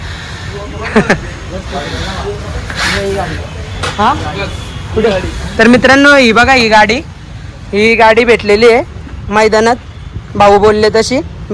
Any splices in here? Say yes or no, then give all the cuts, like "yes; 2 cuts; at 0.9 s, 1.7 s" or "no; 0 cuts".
no; 0 cuts